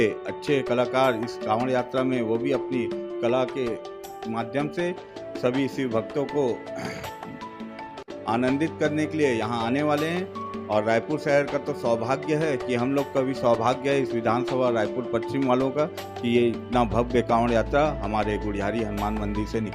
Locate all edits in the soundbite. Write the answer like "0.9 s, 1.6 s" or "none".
none